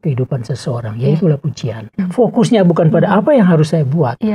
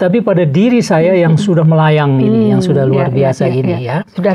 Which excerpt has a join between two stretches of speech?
first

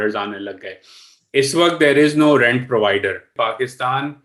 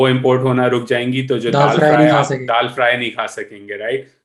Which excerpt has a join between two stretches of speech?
first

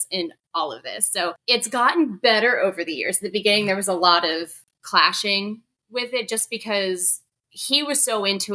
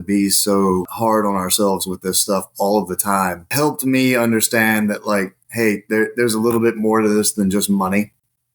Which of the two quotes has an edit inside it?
first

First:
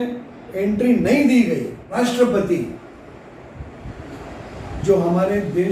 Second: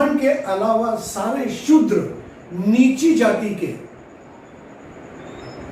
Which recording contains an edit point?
first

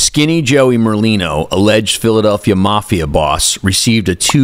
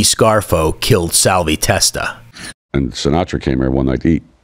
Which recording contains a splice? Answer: second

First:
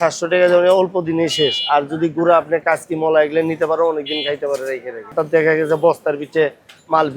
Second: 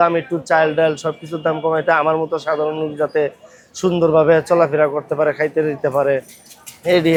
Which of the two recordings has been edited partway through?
first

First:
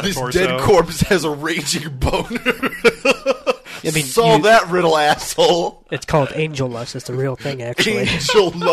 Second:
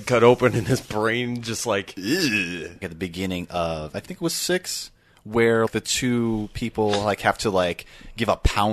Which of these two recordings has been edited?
second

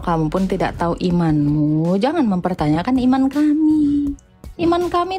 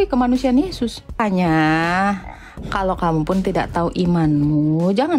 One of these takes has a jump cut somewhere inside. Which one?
second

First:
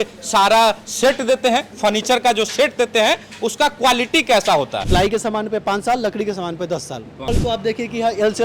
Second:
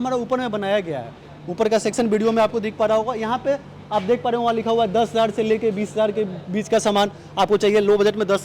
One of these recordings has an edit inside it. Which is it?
first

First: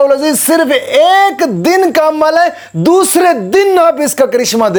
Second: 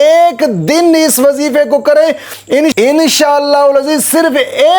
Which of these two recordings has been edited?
second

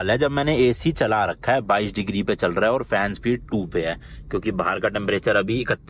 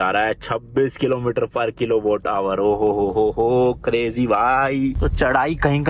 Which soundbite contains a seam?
second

